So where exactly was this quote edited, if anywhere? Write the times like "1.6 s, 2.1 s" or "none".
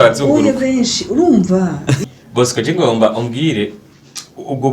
2.0 s